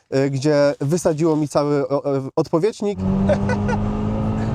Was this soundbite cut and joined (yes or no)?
yes